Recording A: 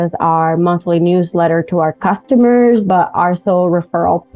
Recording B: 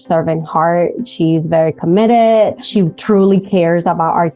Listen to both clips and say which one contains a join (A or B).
B